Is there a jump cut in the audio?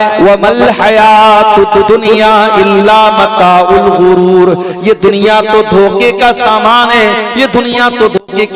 no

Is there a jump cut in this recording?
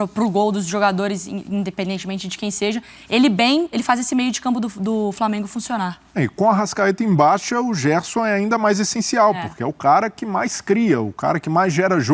no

